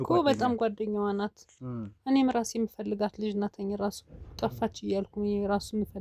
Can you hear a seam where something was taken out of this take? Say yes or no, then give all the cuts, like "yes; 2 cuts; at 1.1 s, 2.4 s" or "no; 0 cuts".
no; 0 cuts